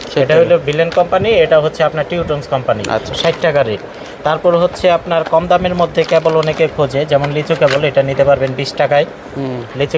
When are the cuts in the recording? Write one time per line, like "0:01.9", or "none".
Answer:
none

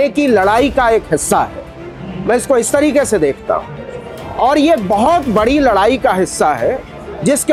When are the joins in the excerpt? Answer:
none

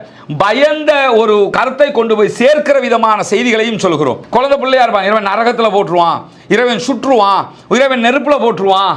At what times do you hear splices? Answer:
0:01.5
0:04.2

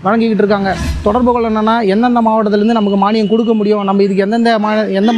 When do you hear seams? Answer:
0:01.0

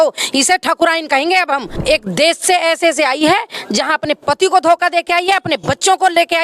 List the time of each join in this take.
0:01.8

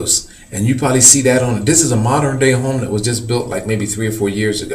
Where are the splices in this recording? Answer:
0:02.7

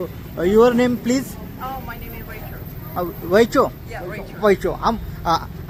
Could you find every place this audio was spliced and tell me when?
none

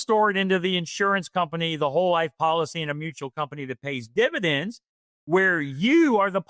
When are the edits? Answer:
none

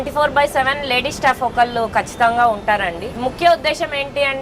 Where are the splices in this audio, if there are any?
0:03.0

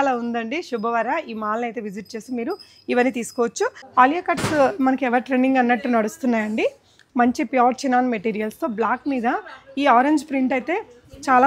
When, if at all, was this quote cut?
0:03.8

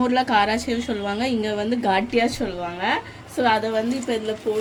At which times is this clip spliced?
none

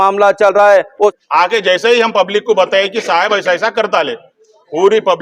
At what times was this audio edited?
0:01.1

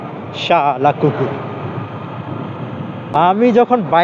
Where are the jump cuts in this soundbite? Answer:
0:03.2

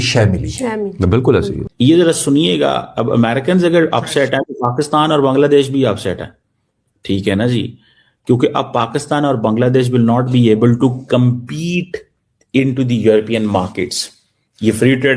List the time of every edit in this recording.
0:01.6

